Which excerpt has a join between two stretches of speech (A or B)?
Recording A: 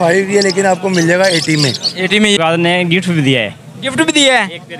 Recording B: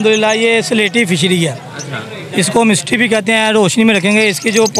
A